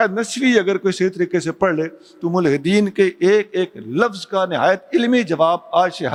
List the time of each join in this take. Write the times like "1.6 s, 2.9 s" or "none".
none

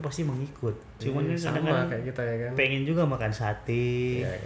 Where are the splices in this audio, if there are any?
0.9 s

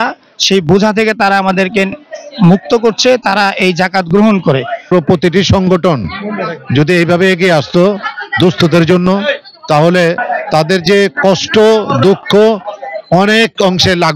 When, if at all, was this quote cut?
4.9 s, 10.2 s

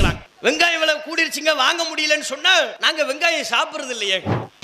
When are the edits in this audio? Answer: 2.8 s

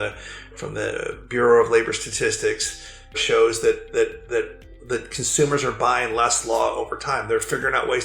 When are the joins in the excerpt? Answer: 3.2 s

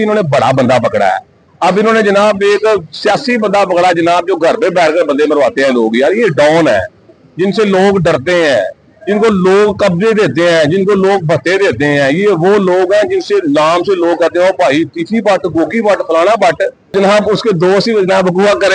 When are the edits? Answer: 16.9 s

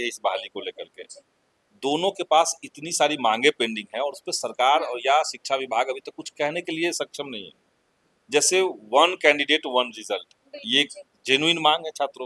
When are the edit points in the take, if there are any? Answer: none

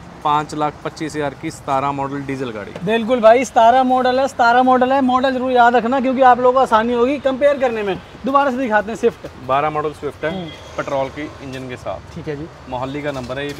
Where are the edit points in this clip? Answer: none

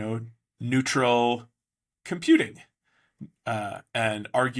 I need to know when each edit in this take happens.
none

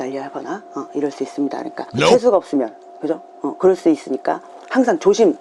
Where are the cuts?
2.1 s

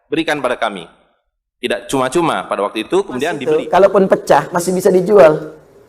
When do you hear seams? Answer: 3.4 s

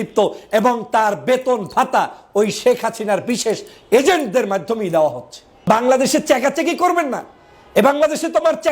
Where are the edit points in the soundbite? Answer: 5.5 s

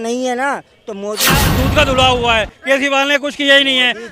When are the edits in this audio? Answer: 1.4 s

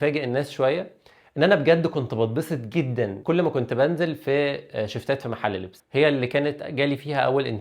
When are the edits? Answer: 3.2 s, 5.7 s

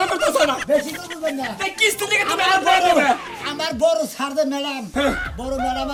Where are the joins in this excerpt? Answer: none

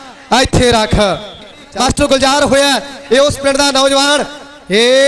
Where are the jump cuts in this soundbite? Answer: 1.6 s

